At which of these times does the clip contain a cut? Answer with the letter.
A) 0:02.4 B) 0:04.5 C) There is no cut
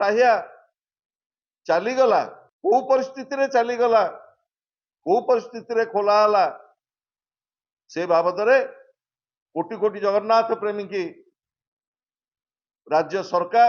A